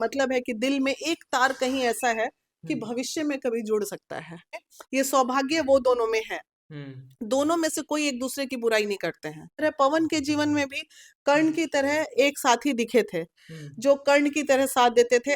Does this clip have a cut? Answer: yes; 2 cuts; at 4.7 s, 9.6 s

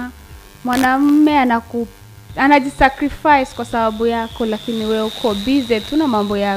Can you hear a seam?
no; 0 cuts

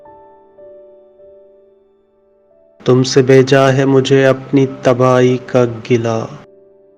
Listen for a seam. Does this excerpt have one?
no; 0 cuts

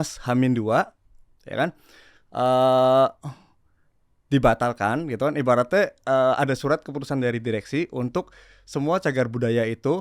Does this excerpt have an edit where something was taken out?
no; 0 cuts

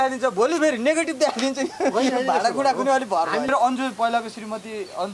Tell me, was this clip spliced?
yes; 1 cut; at 3.5 s

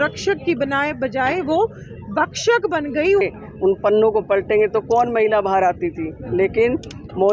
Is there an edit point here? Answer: yes; 1 cut; at 3.2 s

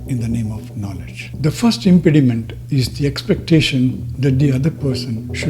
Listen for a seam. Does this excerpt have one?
yes; 1 cut; at 1.2 s

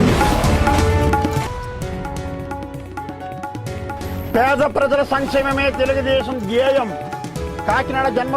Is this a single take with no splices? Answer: no; 1 cut; at 3.3 s

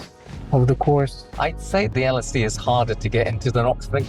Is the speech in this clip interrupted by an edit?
yes; 1 cut; at 1.3 s

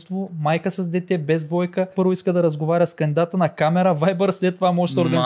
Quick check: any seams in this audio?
yes; 1 cut; at 1.9 s

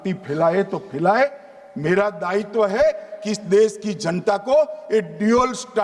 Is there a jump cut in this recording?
no; 0 cuts

